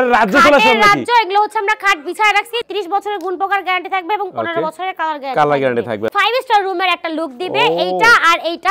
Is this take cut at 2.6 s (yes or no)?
yes